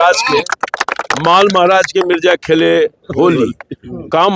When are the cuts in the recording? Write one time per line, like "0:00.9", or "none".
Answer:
none